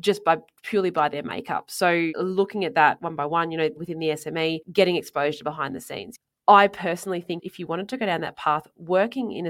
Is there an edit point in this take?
yes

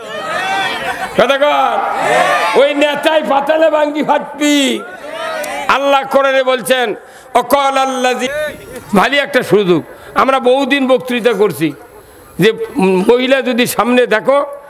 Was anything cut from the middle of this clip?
yes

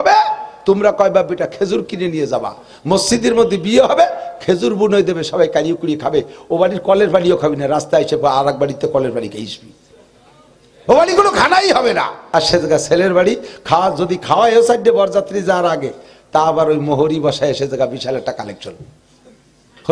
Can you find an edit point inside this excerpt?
yes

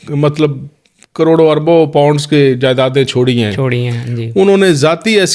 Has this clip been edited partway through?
no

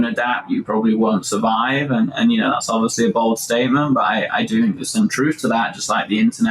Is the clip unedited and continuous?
yes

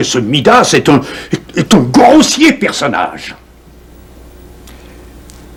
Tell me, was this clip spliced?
no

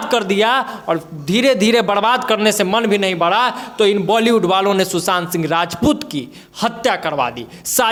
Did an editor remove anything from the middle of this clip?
no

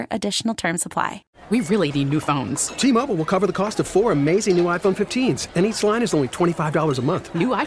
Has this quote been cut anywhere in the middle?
yes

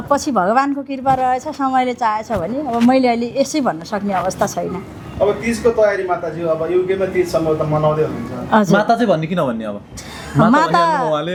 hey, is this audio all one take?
yes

